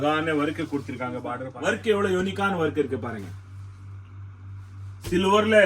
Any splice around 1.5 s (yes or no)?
yes